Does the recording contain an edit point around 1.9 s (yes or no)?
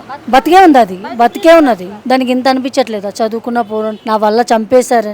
yes